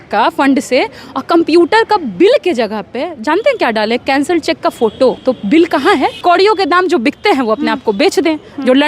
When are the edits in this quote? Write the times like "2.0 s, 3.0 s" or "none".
5.2 s, 6.2 s